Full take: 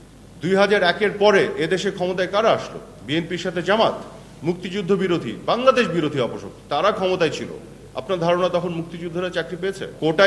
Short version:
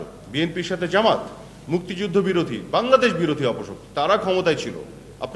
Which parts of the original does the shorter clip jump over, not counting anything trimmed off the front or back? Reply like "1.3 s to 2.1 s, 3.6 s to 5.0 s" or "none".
none